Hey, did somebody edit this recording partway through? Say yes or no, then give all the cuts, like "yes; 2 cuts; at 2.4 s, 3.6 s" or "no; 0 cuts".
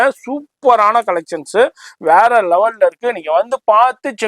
no; 0 cuts